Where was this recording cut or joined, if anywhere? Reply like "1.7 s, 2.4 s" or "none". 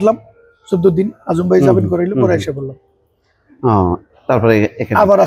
none

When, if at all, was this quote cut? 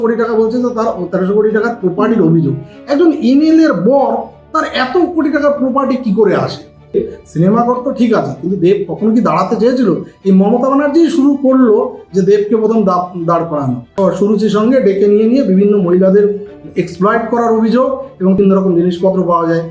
6.9 s, 14.1 s, 18.4 s

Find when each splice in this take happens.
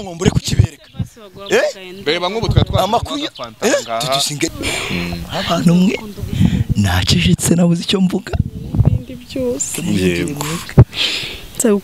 4.5 s

